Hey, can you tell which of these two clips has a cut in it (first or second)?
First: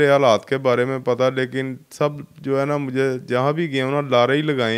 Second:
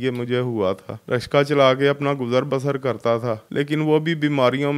second